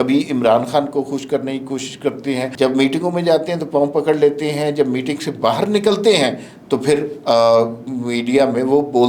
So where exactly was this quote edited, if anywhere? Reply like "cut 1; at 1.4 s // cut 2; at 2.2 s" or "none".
cut 1; at 2.5 s